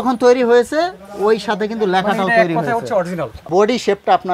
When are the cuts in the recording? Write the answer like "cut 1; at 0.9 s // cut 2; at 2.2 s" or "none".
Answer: cut 1; at 3.4 s